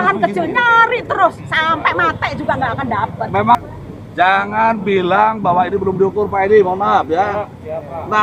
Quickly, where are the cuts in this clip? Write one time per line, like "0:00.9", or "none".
0:03.5